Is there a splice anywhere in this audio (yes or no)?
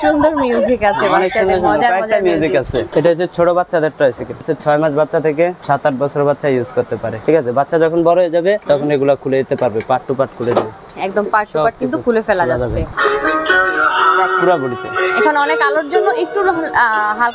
yes